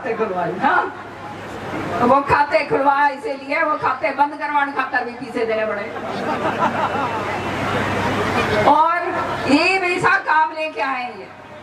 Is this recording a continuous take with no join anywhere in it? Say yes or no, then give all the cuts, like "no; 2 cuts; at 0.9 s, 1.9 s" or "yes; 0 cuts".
yes; 0 cuts